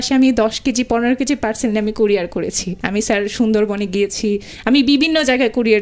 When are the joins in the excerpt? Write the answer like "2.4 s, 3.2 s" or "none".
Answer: 2.7 s